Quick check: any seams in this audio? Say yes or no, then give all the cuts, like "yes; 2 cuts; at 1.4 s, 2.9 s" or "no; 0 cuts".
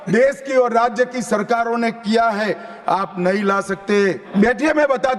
yes; 1 cut; at 4.2 s